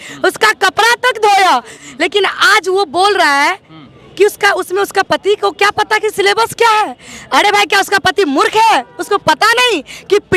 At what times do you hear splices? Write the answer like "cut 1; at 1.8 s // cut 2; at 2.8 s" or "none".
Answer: cut 1; at 1.8 s